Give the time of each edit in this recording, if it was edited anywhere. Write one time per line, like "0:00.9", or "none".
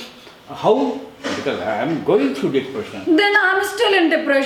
none